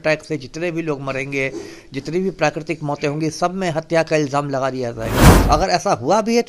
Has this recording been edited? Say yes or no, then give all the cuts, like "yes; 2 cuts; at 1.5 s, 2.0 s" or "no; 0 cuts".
yes; 1 cut; at 5.3 s